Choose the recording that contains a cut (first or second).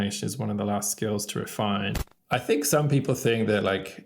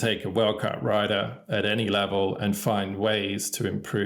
first